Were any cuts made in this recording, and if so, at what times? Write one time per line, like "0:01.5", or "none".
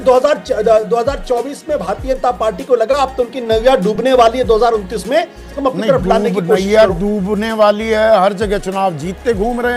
0:05.5

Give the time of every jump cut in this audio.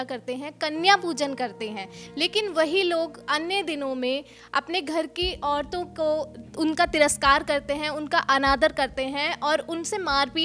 none

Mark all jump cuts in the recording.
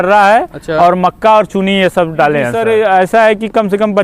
0:02.5

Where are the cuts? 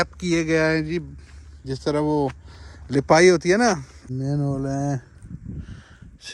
0:03.9

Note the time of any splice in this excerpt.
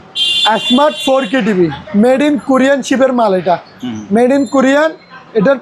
none

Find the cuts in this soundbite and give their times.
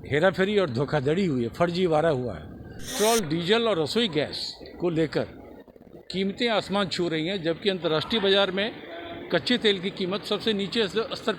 0:02.9

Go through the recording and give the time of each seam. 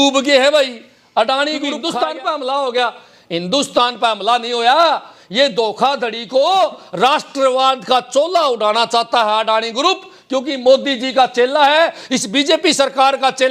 0:01.8

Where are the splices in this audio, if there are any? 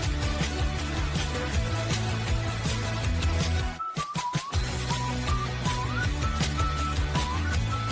none

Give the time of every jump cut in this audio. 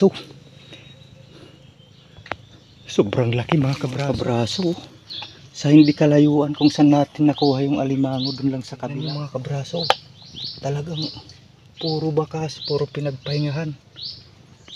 0:03.9
0:09.1

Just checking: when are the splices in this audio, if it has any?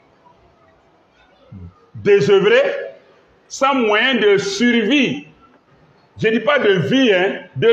none

